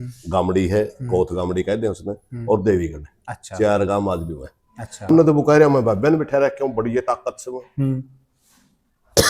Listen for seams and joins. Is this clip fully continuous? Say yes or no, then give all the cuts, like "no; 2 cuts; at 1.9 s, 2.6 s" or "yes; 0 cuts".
no; 1 cut; at 5.1 s